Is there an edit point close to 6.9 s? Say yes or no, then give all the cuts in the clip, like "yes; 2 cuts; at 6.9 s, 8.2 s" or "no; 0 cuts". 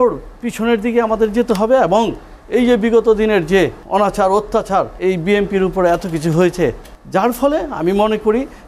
yes; 3 cuts; at 3.8 s, 4.9 s, 6.9 s